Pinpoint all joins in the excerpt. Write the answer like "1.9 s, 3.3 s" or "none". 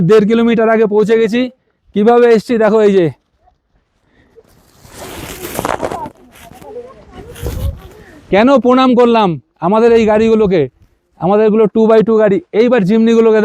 none